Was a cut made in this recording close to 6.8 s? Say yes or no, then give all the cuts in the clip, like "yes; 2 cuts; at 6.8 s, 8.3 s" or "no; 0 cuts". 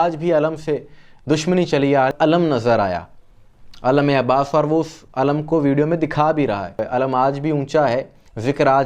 yes; 2 cuts; at 2.1 s, 6.8 s